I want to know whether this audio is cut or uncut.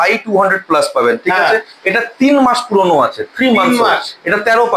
uncut